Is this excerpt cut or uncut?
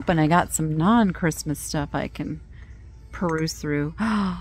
uncut